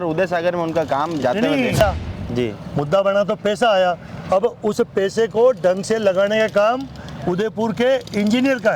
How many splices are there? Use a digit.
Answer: 1